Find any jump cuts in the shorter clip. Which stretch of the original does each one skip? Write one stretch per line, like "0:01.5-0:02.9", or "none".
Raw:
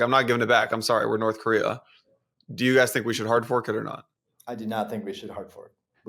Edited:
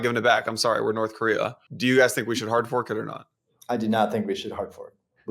0:01.9-0:02.4